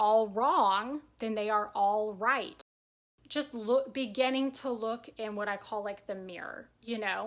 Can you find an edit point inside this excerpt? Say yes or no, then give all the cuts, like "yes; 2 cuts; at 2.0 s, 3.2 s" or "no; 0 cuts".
yes; 1 cut; at 2.8 s